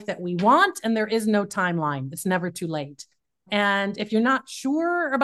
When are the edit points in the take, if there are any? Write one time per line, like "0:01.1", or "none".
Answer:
0:03.5